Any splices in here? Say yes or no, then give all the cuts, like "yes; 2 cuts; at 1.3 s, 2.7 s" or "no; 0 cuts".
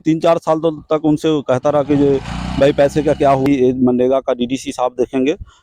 yes; 1 cut; at 3.4 s